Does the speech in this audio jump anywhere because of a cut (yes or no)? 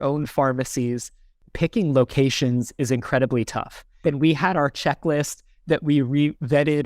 yes